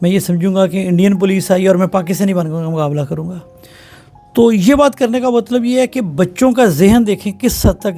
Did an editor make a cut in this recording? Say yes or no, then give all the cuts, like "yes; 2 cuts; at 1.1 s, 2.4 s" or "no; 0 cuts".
no; 0 cuts